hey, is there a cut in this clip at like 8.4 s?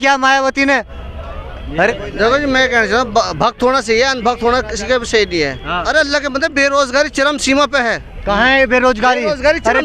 no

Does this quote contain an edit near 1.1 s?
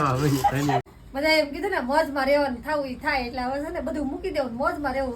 yes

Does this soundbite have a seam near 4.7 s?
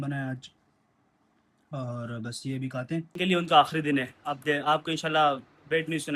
no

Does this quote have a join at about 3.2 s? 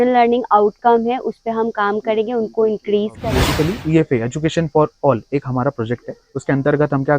yes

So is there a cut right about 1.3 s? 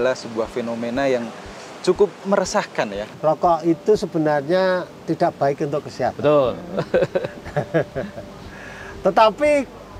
no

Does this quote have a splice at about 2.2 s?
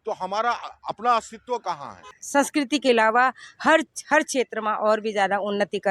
yes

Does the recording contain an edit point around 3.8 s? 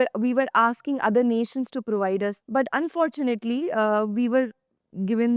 no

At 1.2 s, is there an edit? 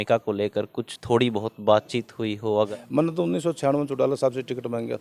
no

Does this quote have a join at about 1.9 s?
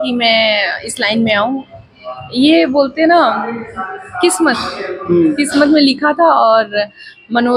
no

